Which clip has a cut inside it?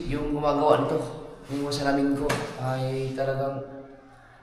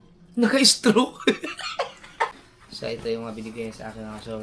second; 1 cut; at 2.3 s

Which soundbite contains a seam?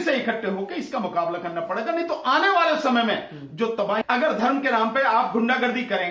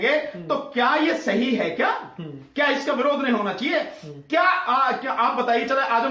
first; 1 cut; at 4.0 s

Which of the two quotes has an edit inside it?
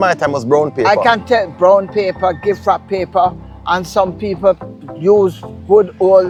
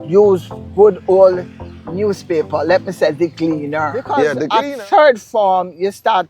second; 1 cut; at 4.3 s

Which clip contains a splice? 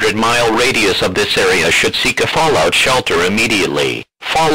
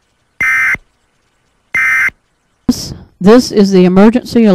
second; 1 cut; at 2.7 s

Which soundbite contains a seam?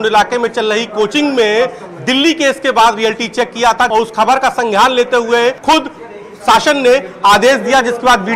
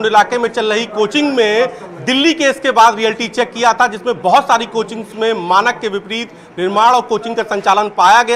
first; 2 cuts; at 3.9 s, 5.6 s

